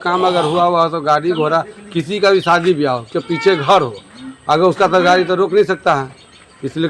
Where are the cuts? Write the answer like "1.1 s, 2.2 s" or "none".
none